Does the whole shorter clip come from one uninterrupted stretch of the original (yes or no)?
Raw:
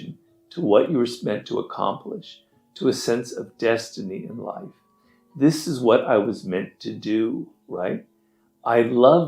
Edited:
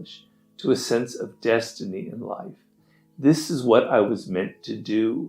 yes